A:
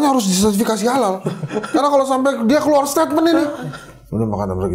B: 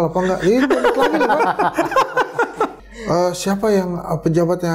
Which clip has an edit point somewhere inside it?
B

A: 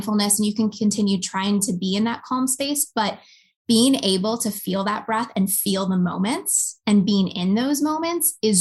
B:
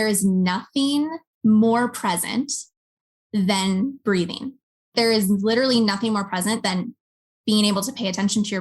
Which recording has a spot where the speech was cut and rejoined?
B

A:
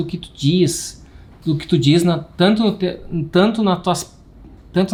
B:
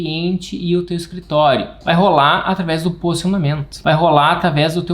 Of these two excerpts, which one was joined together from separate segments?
B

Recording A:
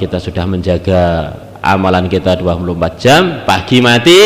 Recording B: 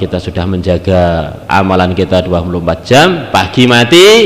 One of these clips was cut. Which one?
B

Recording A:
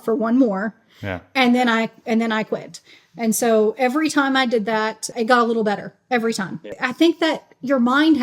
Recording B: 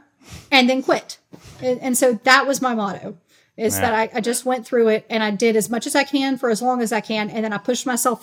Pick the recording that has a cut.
A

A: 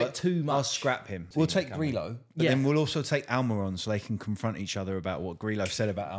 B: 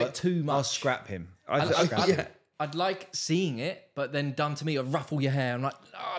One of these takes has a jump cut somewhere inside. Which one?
A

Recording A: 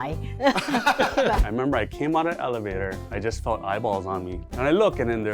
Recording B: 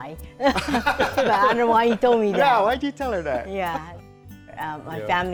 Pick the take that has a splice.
A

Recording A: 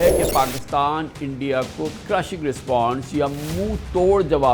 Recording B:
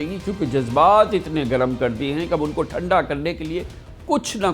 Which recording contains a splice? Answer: A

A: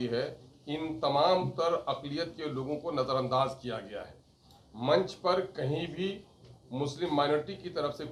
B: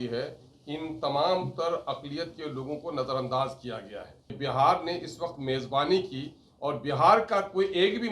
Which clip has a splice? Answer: B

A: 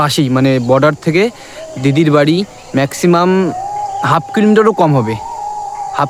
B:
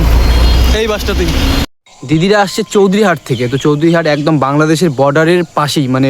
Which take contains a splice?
B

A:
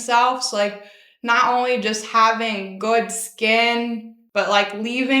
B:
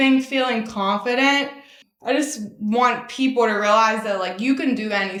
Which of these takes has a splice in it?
A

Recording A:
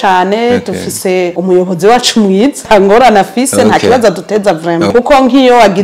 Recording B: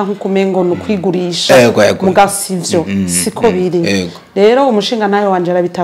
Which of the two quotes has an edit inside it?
A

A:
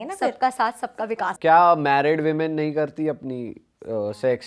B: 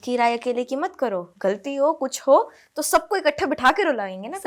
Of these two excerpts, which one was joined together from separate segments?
A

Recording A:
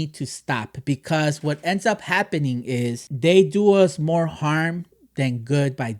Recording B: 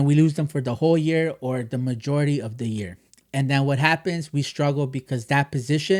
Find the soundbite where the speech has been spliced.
A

